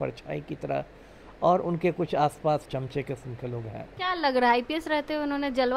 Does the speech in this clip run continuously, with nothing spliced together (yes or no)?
no